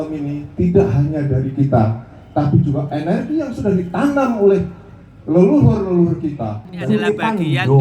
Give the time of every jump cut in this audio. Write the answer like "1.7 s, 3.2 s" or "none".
6.8 s